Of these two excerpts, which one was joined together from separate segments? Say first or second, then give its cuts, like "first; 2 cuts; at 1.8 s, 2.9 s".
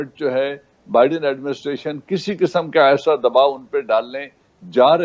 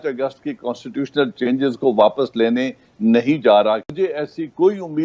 second; 1 cut; at 3.9 s